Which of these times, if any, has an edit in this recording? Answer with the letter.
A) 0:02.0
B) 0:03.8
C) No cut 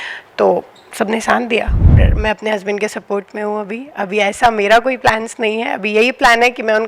A